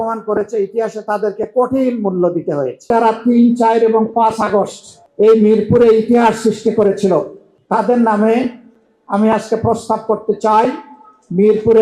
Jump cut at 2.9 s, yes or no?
yes